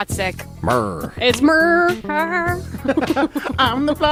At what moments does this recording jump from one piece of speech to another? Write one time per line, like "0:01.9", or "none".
none